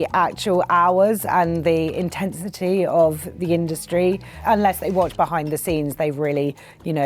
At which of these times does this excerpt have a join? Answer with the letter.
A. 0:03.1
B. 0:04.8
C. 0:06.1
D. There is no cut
D